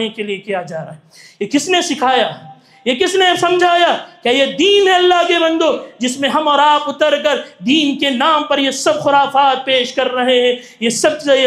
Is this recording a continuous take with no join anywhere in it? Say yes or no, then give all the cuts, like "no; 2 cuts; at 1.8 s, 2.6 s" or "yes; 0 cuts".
yes; 0 cuts